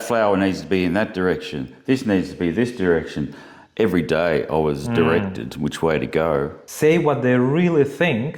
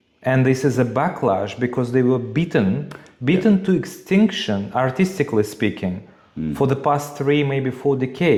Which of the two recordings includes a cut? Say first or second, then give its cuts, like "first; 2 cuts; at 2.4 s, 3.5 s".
first; 1 cut; at 6.6 s